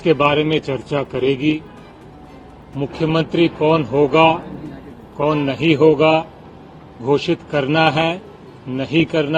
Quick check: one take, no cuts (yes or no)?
yes